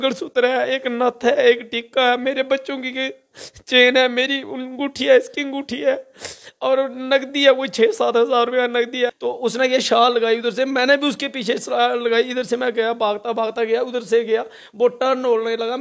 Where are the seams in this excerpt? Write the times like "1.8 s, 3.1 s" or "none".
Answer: 9.2 s